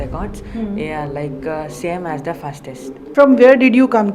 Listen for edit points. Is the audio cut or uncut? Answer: cut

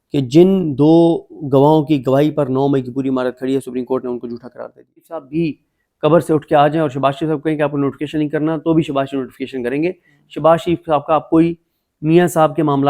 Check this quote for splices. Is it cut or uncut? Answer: cut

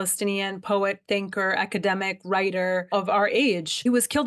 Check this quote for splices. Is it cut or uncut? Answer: uncut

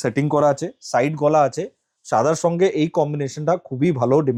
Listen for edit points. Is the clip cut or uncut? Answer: uncut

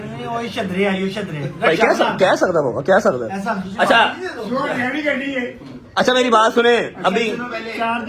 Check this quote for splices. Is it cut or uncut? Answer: uncut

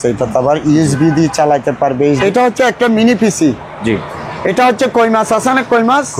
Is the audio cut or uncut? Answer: cut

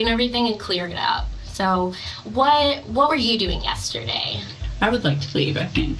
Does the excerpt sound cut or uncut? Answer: uncut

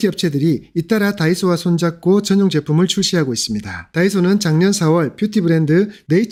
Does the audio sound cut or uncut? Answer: uncut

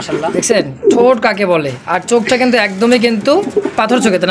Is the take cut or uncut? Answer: uncut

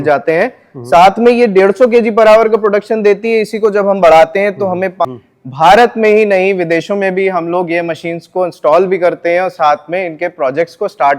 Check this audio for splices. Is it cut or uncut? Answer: cut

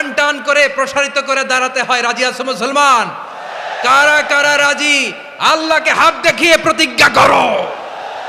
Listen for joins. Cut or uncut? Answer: uncut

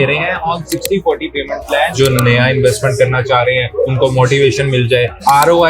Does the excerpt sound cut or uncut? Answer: cut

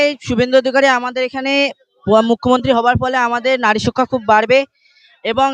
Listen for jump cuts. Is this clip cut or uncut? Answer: uncut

